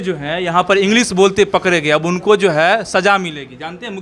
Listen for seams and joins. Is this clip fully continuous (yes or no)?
yes